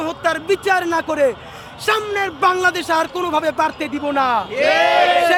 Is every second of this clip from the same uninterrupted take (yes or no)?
yes